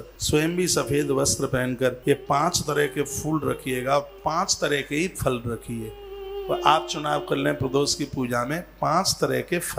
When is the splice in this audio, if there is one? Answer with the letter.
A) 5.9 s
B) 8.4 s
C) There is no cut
C